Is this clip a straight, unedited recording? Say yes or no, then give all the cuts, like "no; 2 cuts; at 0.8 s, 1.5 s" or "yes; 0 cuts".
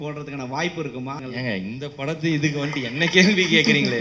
no; 1 cut; at 1.2 s